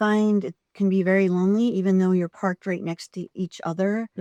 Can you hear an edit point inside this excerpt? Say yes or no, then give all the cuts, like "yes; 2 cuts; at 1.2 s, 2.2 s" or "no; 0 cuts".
no; 0 cuts